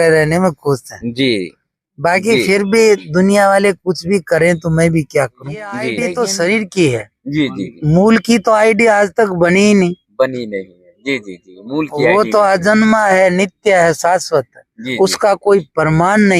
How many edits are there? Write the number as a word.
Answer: one